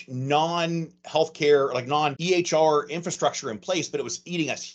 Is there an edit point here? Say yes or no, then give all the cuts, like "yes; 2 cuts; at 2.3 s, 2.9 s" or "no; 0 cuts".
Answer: no; 0 cuts